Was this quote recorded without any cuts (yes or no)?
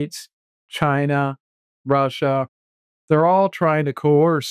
yes